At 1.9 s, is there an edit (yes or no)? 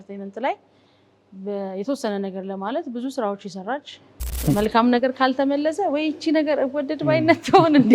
no